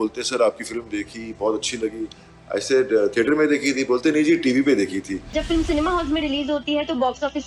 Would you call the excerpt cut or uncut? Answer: cut